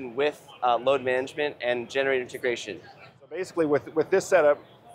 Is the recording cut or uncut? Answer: cut